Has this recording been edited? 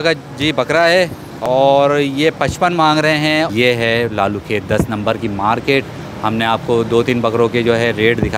yes; 2 cuts; at 1.3 s, 3.5 s

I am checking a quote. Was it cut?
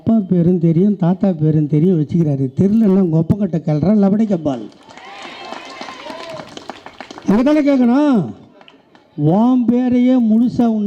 no; 0 cuts

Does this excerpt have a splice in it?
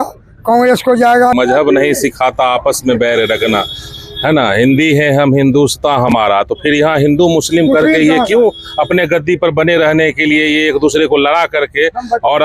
yes; 1 cut; at 1.3 s

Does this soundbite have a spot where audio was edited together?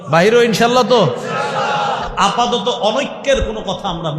yes; 1 cut; at 2.0 s

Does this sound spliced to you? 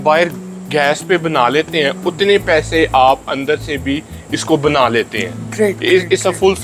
no; 0 cuts

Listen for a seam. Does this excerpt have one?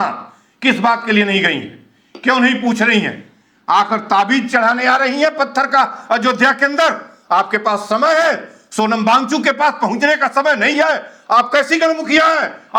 no; 0 cuts

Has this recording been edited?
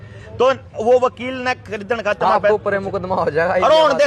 no; 0 cuts

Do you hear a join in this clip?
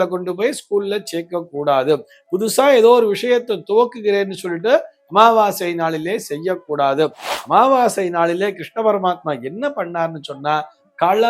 no; 0 cuts

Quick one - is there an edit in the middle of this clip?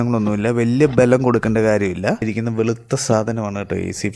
yes; 1 cut; at 2.3 s

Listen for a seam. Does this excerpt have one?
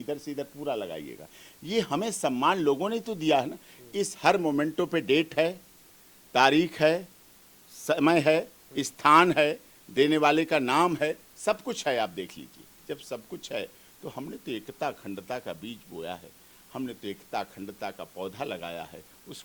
no; 0 cuts

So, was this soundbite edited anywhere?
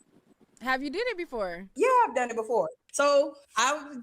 yes; 2 cuts; at 1.7 s, 2.8 s

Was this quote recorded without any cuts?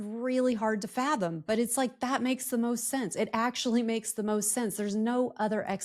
yes; 0 cuts

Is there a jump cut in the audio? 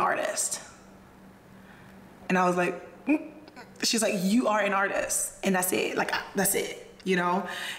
no; 0 cuts

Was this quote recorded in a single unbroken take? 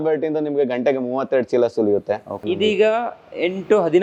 yes; 0 cuts

